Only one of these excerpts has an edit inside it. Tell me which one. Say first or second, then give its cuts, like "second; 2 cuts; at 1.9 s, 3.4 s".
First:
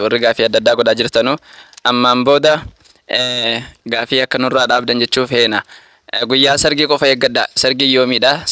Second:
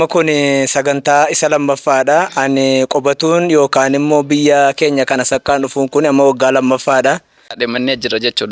second; 1 cut; at 7.5 s